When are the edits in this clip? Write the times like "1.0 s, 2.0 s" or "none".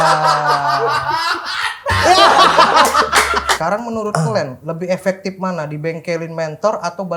3.5 s, 4.6 s